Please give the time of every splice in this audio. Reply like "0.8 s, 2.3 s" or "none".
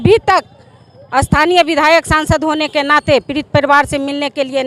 none

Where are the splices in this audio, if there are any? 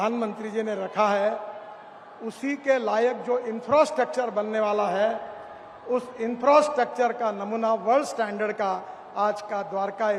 none

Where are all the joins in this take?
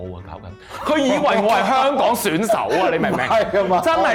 none

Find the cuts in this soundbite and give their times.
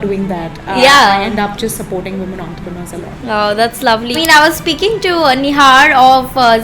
4.2 s

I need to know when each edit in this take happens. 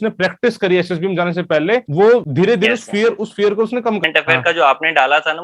2.0 s, 4.0 s

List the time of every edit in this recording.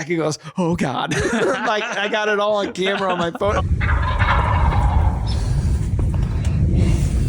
3.6 s

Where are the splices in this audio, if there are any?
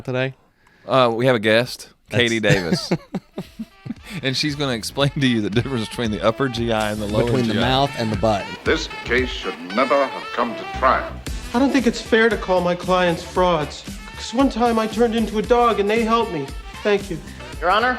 8.5 s

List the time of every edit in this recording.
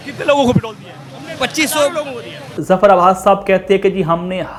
none

